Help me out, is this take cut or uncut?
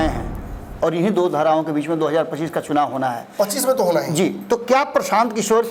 uncut